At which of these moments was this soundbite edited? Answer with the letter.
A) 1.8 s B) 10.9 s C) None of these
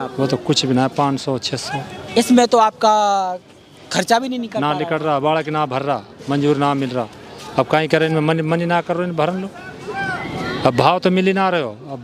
C